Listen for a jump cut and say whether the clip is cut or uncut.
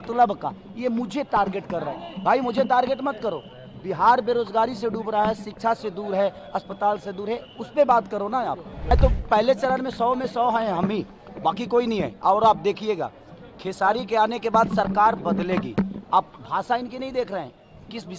cut